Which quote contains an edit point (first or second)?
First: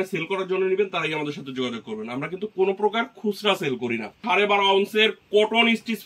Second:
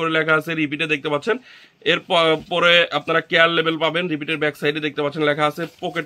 first